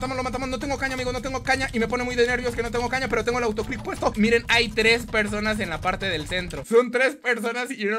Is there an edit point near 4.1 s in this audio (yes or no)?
yes